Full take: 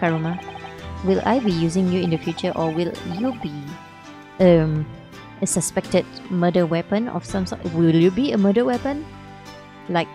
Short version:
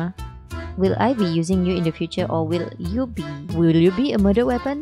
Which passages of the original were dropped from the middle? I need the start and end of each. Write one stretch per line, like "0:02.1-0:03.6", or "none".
0:03.7-0:07.6